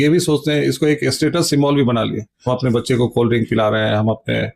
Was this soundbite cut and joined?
no; 0 cuts

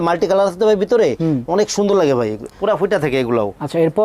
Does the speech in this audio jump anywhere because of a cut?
no; 0 cuts

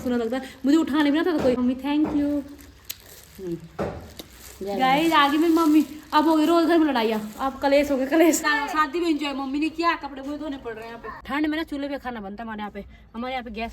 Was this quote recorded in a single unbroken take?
no; 3 cuts; at 1.6 s, 8.5 s, 11.1 s

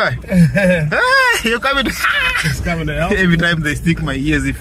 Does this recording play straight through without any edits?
yes; 0 cuts

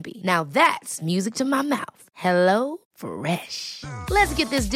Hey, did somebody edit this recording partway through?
no; 0 cuts

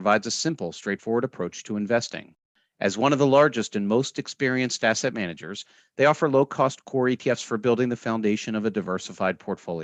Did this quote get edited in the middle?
no; 0 cuts

